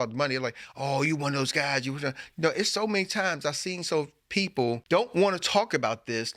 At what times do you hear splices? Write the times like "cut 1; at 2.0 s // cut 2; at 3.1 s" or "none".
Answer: cut 1; at 4.8 s